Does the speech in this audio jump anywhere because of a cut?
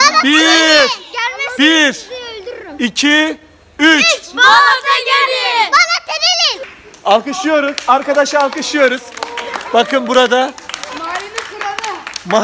yes; 1 cut; at 6.7 s

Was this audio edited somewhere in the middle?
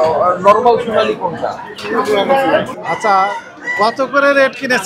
yes; 1 cut; at 2.8 s

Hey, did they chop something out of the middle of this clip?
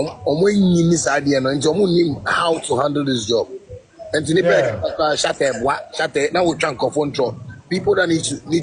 no; 0 cuts

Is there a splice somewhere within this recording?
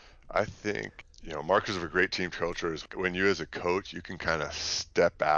yes; 2 cuts; at 0.9 s, 2.9 s

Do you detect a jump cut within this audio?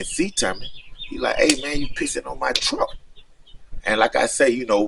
no; 0 cuts

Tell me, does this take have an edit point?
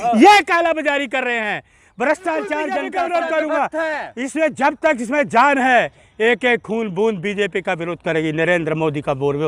yes; 1 cut; at 2.8 s

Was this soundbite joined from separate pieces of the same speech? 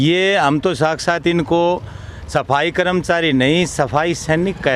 no; 0 cuts

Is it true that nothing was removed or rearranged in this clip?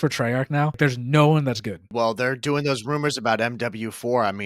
no; 2 cuts; at 0.8 s, 1.9 s

